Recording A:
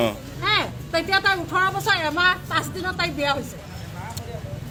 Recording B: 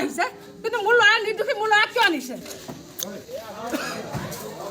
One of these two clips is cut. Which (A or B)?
B